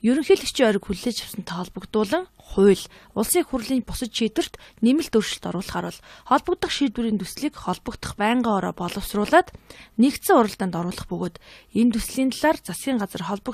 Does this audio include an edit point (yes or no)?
yes